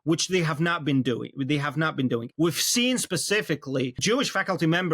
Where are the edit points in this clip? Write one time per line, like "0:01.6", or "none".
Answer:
0:02.3
0:04.0